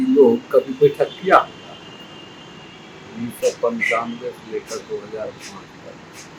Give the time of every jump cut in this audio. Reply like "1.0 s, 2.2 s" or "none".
none